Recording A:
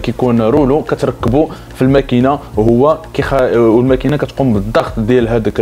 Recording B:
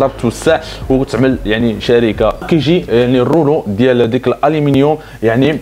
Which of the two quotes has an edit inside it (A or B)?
B